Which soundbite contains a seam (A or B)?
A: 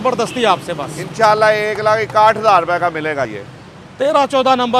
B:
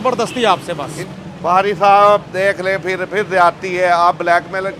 B